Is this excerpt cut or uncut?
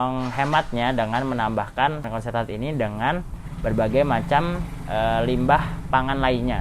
cut